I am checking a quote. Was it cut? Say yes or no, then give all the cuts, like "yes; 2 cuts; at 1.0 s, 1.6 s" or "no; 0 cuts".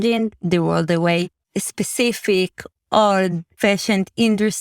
yes; 2 cuts; at 1.4 s, 3.5 s